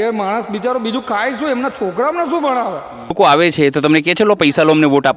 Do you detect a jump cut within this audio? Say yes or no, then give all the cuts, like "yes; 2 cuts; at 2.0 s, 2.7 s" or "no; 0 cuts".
yes; 1 cut; at 3.1 s